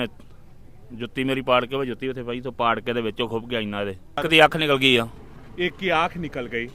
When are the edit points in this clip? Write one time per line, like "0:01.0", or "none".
0:04.2